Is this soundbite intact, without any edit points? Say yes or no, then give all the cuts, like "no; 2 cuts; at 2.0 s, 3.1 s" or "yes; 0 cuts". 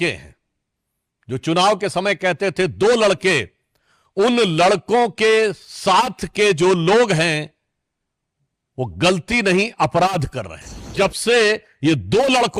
no; 1 cut; at 10.9 s